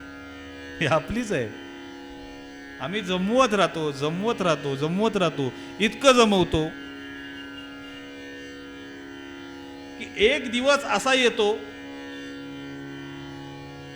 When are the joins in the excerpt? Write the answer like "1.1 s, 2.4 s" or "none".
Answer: none